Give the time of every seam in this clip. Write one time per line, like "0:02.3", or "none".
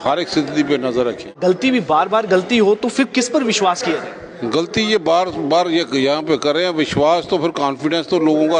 0:01.3